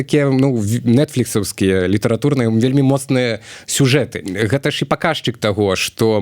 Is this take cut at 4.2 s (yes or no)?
yes